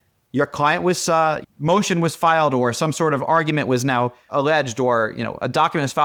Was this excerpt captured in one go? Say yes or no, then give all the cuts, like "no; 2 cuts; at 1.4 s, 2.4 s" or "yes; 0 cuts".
yes; 0 cuts